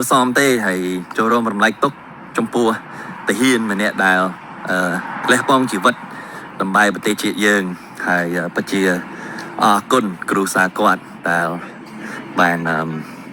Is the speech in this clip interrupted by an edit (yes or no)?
no